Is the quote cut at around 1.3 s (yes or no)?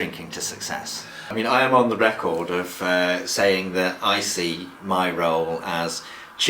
yes